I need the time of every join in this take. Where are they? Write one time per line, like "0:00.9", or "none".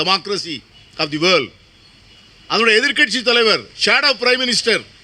none

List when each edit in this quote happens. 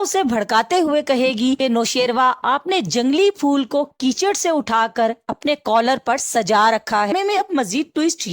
0:07.1

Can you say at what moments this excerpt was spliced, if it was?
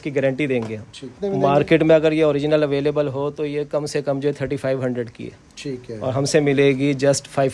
0:01.1

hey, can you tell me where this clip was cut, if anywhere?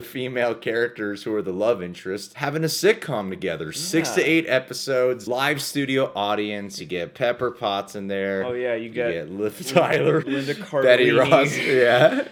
none

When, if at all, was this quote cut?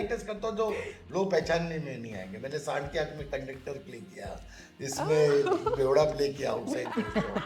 none

